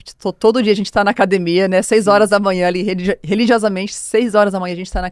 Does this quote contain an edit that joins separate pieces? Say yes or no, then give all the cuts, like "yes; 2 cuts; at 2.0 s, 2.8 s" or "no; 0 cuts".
no; 0 cuts